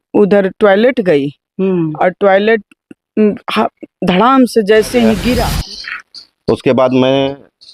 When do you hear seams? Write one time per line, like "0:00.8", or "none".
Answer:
0:05.6